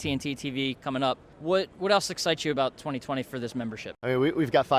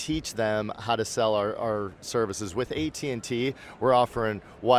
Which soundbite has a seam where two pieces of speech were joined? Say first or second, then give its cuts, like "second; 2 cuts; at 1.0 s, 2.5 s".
first; 2 cuts; at 1.3 s, 3.9 s